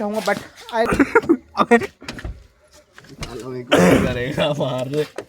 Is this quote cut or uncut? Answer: cut